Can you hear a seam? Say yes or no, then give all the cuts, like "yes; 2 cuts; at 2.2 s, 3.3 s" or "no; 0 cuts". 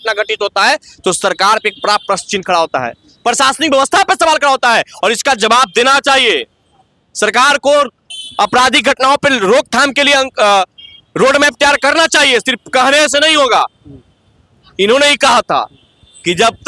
no; 0 cuts